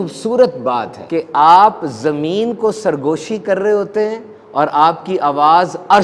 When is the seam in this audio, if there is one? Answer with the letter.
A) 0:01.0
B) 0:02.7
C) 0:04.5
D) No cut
A